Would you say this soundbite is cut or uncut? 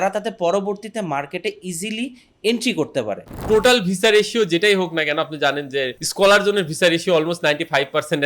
cut